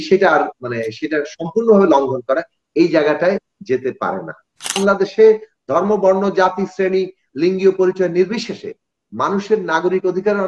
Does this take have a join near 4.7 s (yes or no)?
yes